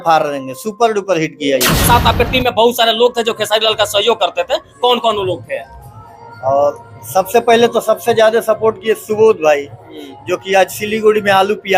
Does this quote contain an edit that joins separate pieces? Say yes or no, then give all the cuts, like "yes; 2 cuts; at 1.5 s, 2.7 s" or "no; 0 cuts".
yes; 1 cut; at 1.9 s